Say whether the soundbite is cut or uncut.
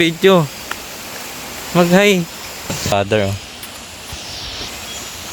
cut